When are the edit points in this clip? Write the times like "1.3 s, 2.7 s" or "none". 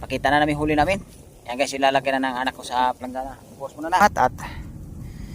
4.0 s